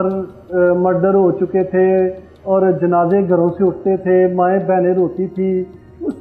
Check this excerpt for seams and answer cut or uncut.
uncut